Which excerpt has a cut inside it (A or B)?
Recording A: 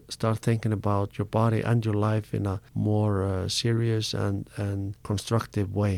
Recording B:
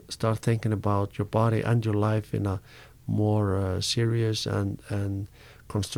A